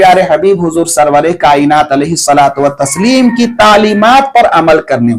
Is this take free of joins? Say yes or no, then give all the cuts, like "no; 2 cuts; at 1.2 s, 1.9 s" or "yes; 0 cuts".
yes; 0 cuts